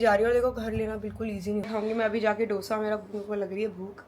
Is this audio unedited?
no; 1 cut; at 1.7 s

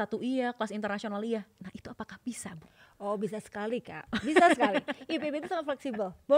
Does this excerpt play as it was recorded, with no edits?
yes; 0 cuts

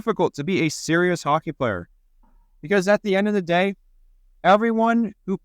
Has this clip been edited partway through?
no; 0 cuts

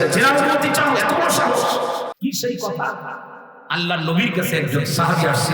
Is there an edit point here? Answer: yes; 1 cut; at 2.1 s

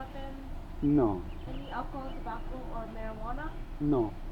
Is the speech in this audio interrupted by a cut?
no; 0 cuts

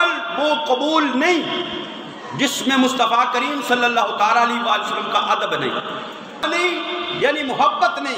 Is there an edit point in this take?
yes; 1 cut; at 6.4 s

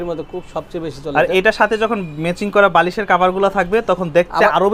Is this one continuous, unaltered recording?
yes; 0 cuts

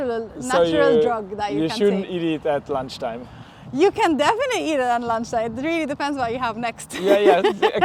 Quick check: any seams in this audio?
no; 0 cuts

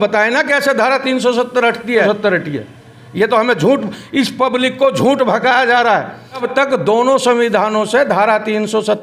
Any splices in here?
yes; 2 cuts; at 2.0 s, 6.5 s

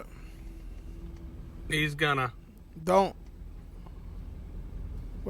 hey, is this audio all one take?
yes; 0 cuts

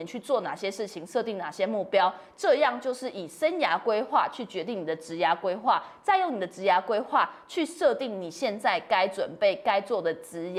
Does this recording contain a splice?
no; 0 cuts

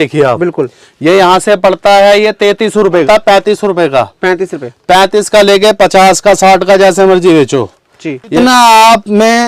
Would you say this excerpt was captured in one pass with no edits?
no; 2 cuts; at 3.0 s, 8.3 s

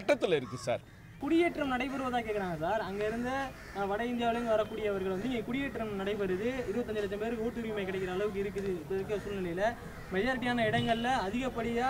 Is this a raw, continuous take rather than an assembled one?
no; 1 cut; at 1.1 s

